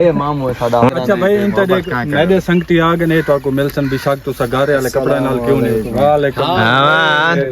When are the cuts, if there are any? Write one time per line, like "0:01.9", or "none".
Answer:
0:00.9